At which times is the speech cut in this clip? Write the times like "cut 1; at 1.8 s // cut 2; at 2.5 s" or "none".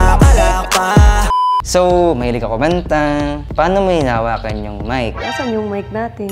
cut 1; at 1.3 s